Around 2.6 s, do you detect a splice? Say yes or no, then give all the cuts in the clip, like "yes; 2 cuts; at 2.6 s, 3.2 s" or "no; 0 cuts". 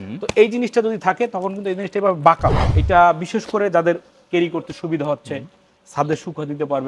yes; 1 cut; at 2.6 s